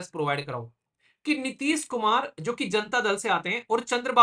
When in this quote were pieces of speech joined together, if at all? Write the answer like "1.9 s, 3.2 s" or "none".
0.9 s